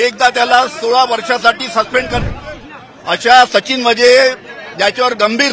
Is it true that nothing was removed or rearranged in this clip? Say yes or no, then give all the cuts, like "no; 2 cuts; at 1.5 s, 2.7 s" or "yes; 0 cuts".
no; 1 cut; at 2.2 s